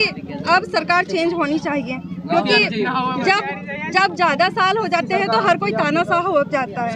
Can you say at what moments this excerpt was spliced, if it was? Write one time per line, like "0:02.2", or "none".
none